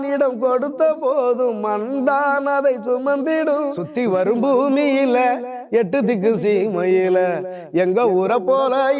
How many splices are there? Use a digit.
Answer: 1